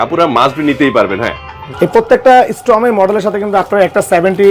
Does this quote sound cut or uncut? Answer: cut